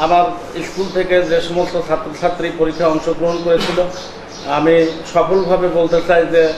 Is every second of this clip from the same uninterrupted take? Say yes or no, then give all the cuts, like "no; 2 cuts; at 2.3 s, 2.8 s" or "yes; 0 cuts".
yes; 0 cuts